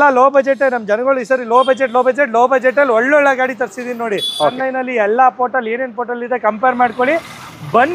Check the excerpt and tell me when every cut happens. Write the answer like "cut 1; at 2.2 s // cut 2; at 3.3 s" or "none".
cut 1; at 4.5 s